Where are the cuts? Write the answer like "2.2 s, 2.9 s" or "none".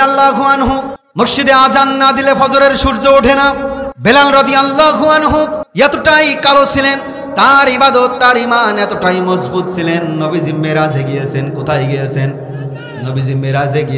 1.0 s, 3.9 s, 5.6 s